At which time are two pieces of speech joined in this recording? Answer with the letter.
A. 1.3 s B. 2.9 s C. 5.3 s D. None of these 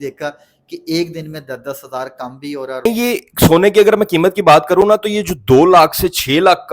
B